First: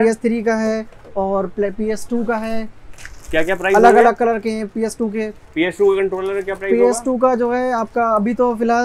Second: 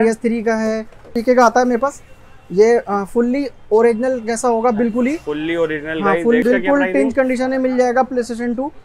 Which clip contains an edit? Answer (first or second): second